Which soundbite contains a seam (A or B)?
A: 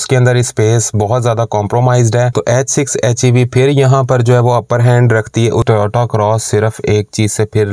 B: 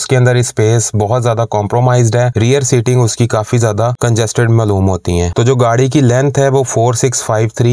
A